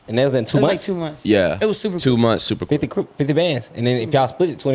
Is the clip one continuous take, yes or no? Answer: yes